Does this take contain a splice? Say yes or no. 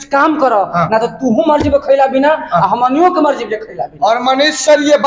no